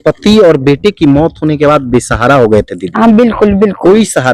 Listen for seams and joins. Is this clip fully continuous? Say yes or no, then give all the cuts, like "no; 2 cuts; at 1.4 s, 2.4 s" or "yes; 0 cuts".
yes; 0 cuts